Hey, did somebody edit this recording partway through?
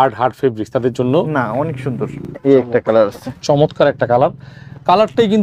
yes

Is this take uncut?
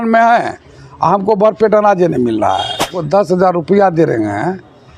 no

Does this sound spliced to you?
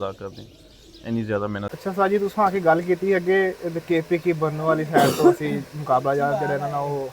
yes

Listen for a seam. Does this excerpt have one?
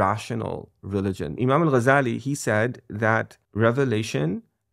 yes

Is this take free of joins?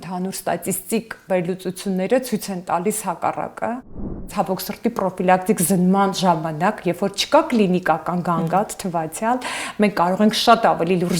no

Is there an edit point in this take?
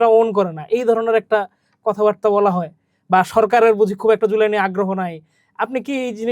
no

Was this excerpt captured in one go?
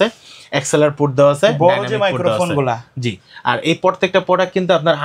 yes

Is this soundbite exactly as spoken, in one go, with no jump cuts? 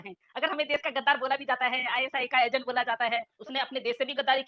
no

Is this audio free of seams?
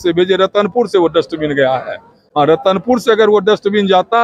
yes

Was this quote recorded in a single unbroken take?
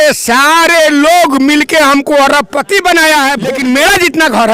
no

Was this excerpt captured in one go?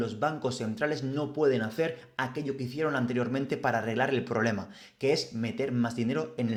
yes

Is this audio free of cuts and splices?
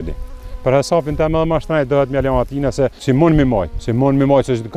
no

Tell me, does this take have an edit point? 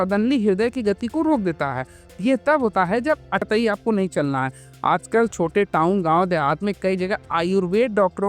yes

